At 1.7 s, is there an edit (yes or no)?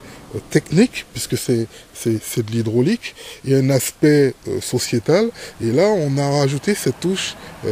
no